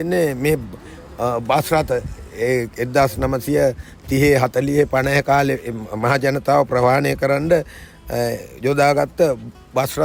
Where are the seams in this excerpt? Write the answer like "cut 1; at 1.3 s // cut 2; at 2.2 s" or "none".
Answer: none